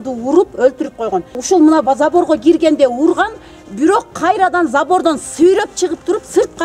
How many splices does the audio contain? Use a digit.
1